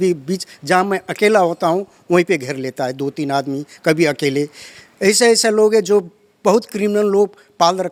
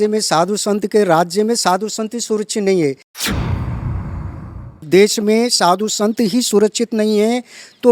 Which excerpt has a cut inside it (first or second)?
second